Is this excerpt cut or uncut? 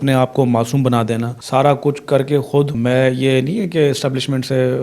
cut